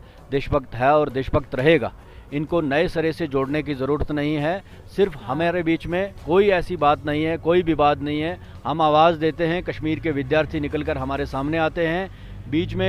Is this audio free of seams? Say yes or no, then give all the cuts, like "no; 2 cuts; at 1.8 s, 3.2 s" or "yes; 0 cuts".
yes; 0 cuts